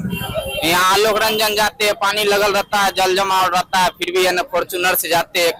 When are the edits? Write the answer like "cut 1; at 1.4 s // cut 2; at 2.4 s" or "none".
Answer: none